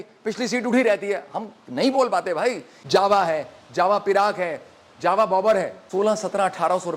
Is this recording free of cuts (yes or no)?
no